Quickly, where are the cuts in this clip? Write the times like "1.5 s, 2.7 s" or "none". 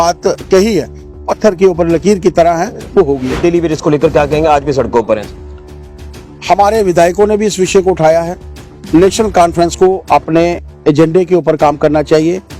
3.4 s